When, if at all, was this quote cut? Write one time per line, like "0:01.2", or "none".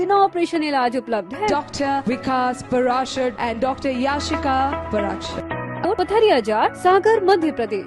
0:05.8

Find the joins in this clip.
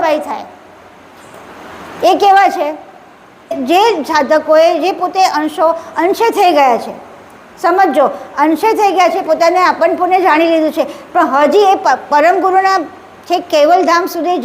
0:03.6

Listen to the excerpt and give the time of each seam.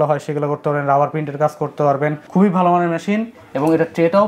0:02.2

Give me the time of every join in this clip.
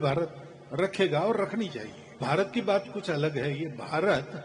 0:02.2

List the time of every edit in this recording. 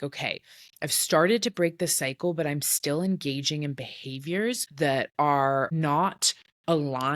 0:04.7
0:05.7

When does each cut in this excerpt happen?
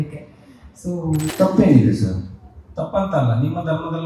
0:01.3

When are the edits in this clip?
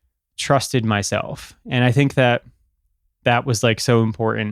none

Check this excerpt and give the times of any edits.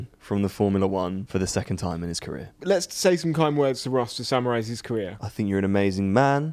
0:01.2
0:02.5
0:05.2

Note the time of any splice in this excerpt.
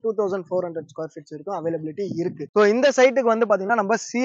0:02.4

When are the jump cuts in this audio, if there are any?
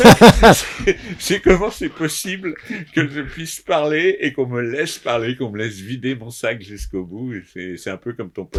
none

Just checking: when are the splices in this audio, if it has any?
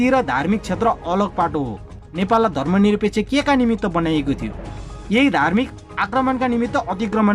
0:02.1

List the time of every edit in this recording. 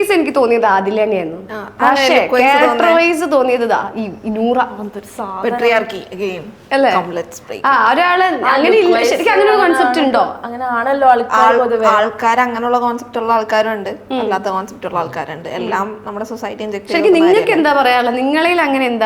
none

